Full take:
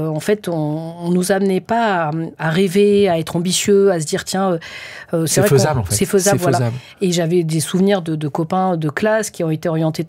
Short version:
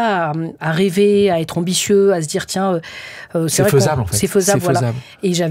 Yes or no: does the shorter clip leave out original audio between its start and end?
no